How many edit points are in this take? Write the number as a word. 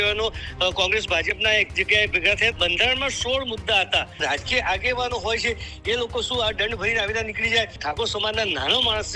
three